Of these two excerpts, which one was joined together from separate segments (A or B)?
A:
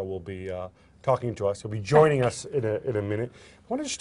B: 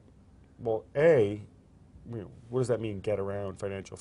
B